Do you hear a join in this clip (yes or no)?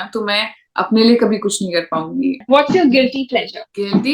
yes